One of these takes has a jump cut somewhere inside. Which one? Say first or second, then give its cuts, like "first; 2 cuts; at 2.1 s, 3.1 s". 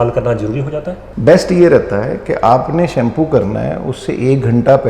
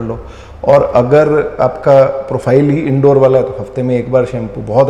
first; 1 cut; at 1.0 s